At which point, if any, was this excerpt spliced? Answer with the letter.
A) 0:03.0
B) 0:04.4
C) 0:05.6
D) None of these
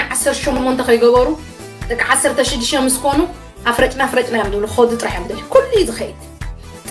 D